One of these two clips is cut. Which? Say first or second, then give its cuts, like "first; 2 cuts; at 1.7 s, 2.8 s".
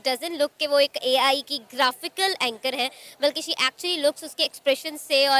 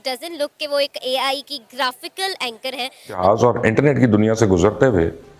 second; 1 cut; at 3.2 s